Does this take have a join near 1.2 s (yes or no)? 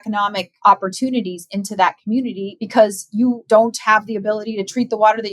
no